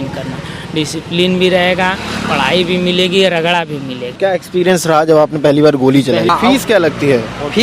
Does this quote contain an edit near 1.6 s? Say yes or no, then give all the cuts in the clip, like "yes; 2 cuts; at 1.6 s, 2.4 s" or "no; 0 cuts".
no; 2 cuts; at 4.0 s, 6.3 s